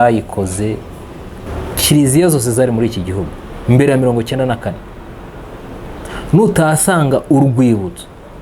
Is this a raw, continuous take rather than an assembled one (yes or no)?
no